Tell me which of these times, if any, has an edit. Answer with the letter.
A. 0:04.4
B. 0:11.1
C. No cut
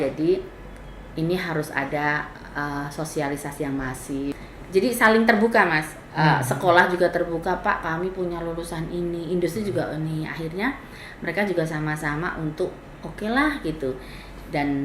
A